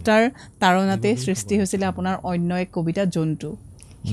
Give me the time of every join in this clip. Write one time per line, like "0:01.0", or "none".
none